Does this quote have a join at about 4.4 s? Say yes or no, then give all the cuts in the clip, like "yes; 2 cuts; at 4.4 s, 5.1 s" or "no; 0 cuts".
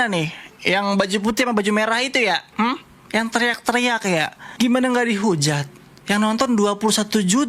yes; 1 cut; at 4.4 s